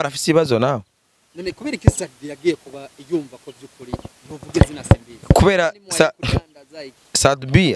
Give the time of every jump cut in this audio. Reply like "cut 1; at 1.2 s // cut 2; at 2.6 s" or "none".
none

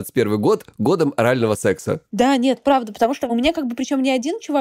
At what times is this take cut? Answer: none

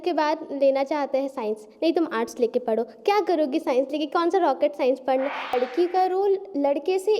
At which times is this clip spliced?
cut 1; at 5.5 s

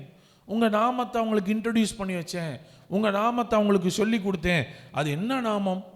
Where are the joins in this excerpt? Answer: none

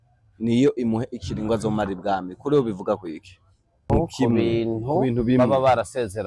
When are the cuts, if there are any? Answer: cut 1; at 3.9 s

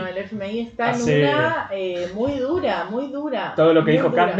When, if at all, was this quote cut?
none

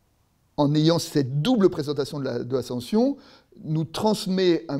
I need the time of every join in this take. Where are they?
none

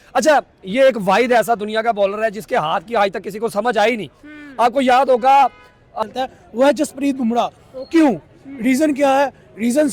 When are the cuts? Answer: cut 1; at 6.0 s

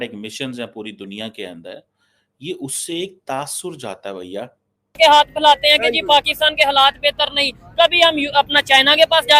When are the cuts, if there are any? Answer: cut 1; at 5.0 s

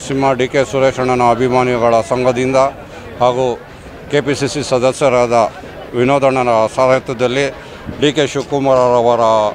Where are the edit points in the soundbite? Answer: none

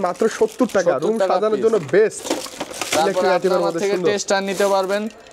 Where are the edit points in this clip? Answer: none

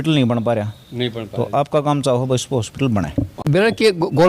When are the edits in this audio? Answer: cut 1; at 3.4 s

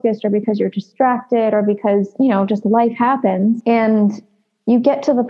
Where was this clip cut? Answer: cut 1; at 2.1 s // cut 2; at 3.6 s

